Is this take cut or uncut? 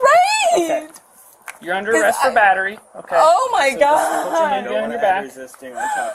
uncut